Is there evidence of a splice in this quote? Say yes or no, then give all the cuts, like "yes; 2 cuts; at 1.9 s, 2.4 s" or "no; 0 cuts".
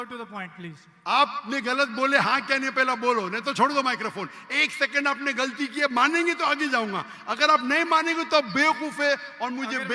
no; 0 cuts